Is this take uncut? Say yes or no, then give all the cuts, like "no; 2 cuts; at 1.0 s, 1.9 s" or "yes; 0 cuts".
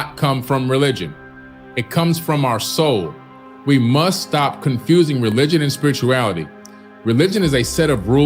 yes; 0 cuts